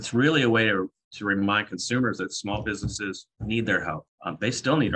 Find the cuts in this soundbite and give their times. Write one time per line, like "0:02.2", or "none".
0:03.3
0:04.1